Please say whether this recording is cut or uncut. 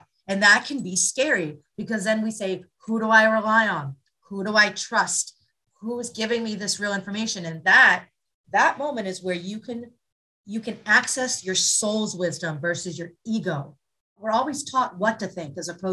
cut